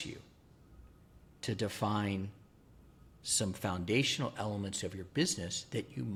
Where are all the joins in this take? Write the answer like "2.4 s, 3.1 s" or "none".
none